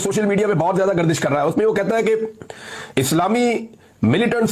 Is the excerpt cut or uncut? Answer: uncut